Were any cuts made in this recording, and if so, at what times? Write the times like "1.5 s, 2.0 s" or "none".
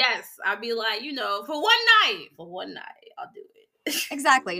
none

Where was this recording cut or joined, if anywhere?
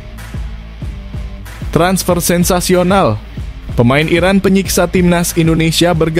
none

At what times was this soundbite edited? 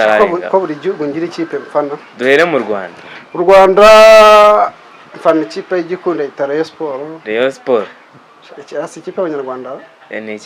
none

